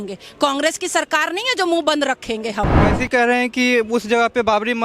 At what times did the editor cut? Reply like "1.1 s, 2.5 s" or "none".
2.8 s